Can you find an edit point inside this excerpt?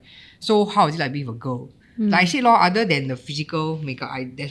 no; 0 cuts

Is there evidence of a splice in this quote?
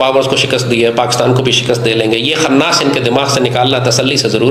no; 0 cuts

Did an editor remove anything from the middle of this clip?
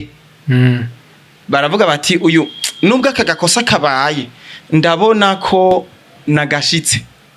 no; 0 cuts

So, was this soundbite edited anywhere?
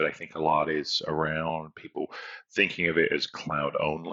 no; 0 cuts

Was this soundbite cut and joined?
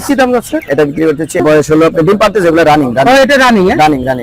yes; 1 cut; at 1.4 s

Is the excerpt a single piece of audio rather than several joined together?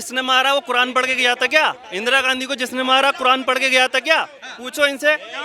yes; 0 cuts

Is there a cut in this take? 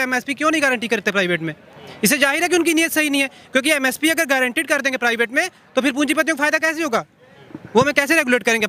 no; 0 cuts

